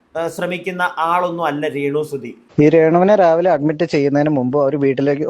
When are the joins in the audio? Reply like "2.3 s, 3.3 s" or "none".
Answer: 2.3 s